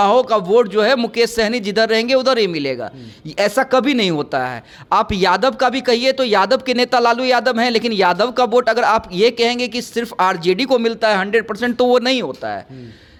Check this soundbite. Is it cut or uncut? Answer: uncut